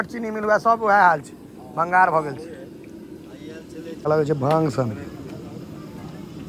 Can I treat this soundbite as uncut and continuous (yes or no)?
no